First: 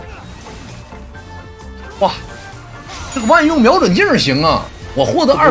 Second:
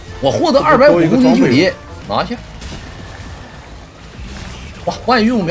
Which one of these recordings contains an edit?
second; 1 cut; at 1.9 s

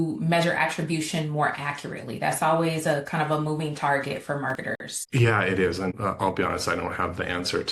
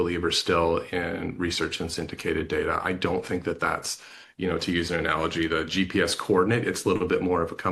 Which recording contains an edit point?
first; 2 cuts; at 4.6 s, 6.0 s

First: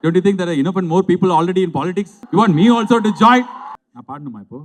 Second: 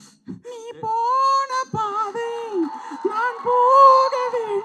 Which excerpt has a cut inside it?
first; 2 cuts; at 2.1 s, 3.6 s

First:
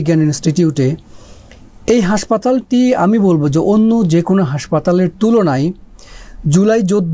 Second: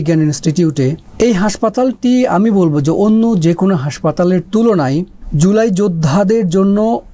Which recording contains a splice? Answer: second; 2 cuts; at 1.0 s, 5.2 s

